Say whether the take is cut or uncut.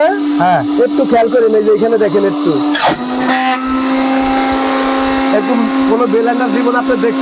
uncut